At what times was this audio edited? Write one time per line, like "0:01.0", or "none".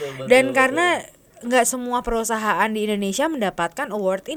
none